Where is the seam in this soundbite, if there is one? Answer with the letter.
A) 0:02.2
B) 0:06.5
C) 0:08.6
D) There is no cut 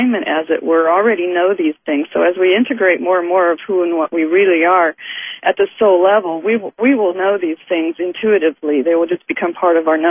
A